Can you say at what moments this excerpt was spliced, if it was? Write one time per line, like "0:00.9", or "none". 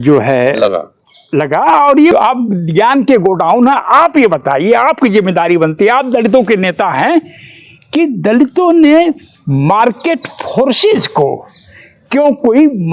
0:02.1